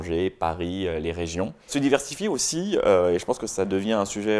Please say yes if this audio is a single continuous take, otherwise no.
no